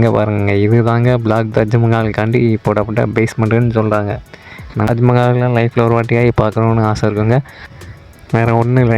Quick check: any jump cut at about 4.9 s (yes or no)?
yes